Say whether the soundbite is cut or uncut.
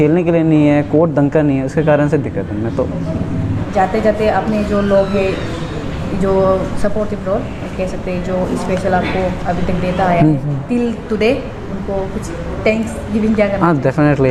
uncut